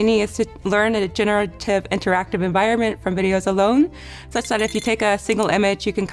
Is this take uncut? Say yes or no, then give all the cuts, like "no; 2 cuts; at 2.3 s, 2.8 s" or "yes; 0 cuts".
yes; 0 cuts